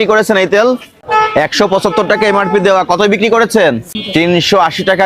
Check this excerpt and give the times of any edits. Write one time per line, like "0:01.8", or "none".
0:00.9
0:03.9

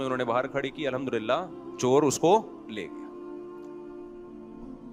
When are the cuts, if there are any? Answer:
none

